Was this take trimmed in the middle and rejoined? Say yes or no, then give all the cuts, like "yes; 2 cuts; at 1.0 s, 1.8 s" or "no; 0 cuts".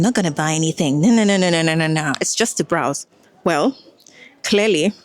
no; 0 cuts